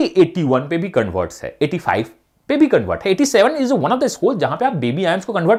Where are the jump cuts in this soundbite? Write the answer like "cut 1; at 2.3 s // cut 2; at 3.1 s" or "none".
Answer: none